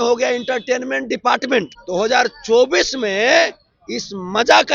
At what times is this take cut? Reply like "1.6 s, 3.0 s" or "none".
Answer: 1.8 s